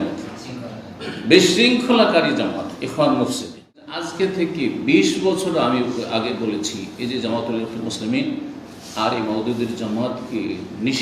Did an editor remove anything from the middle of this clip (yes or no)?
yes